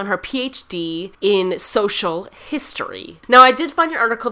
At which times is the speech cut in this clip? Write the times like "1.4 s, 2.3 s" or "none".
1.1 s, 3.1 s